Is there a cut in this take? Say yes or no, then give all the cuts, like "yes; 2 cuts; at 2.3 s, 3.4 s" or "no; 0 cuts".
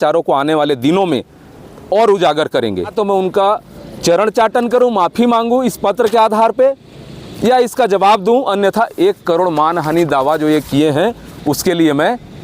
yes; 1 cut; at 2.9 s